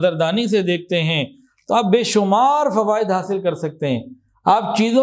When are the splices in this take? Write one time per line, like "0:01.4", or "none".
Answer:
none